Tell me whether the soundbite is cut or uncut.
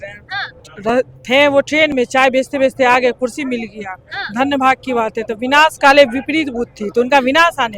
uncut